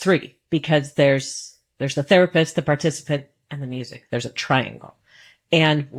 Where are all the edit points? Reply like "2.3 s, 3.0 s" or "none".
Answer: none